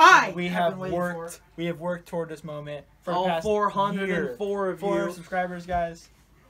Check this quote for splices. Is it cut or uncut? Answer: uncut